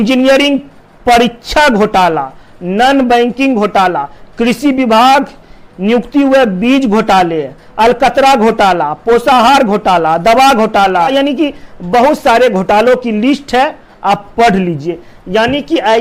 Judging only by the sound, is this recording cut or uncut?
uncut